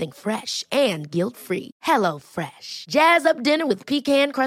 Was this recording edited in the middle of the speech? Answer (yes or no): no